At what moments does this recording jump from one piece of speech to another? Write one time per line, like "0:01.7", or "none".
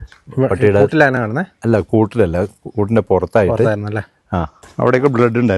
0:04.6